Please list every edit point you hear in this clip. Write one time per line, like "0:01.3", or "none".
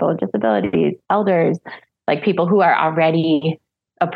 0:01.0

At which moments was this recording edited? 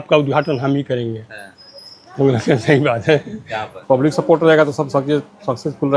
0:03.8

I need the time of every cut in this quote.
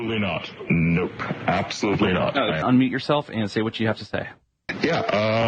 0:02.6

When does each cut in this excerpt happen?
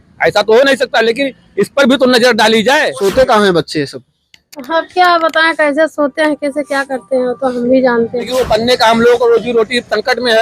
0:02.9
0:08.3

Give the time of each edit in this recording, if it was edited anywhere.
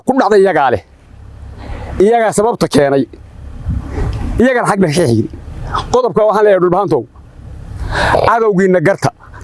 none

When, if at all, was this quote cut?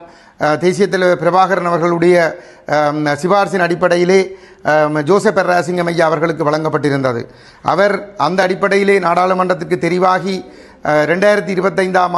none

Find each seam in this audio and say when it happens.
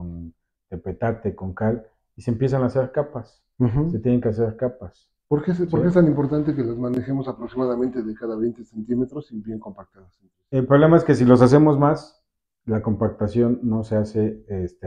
none

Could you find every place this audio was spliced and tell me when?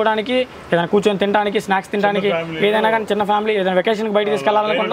none

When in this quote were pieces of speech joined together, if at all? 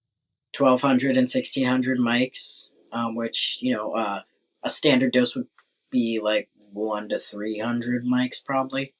none

